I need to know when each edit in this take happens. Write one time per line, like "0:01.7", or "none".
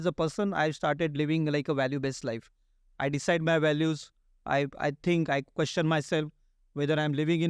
none